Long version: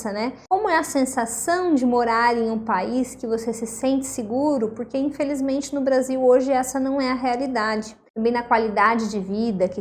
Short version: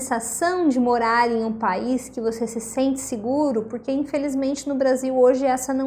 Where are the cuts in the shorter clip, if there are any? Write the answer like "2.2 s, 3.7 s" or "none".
none